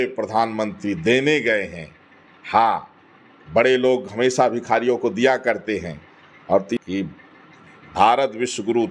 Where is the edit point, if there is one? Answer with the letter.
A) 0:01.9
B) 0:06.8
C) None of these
B